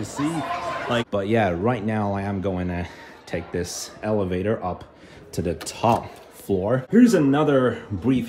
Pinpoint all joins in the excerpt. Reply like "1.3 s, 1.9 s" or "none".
1.1 s, 6.8 s